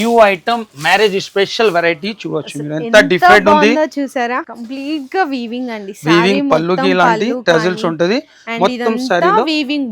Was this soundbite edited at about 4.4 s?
yes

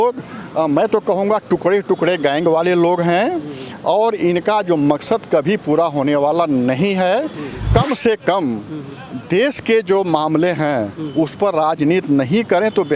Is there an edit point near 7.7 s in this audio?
yes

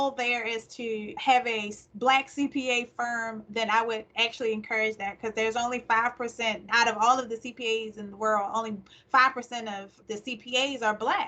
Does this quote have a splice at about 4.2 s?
no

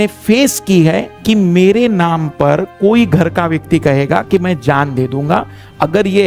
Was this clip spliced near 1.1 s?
yes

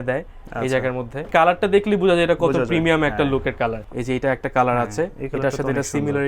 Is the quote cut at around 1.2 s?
yes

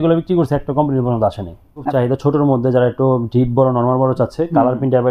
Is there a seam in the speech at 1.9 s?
yes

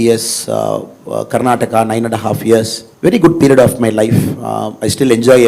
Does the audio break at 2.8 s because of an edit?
yes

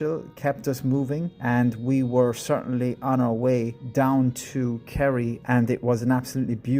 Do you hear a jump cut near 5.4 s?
yes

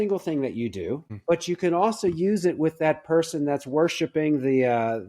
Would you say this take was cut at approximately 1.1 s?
yes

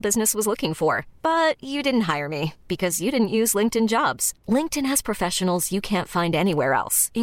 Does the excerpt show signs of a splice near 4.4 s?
no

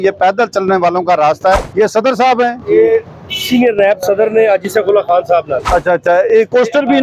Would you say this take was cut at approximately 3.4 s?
no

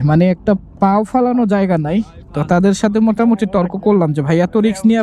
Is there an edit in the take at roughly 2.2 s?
no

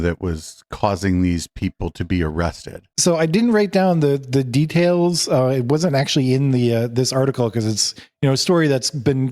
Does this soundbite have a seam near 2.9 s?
no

